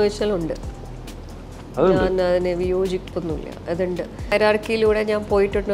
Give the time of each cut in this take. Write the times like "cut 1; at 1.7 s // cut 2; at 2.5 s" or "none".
cut 1; at 4.3 s